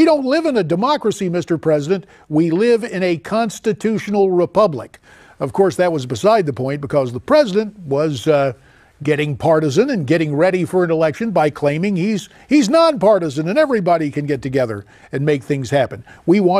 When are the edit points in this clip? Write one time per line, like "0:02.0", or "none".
0:10.6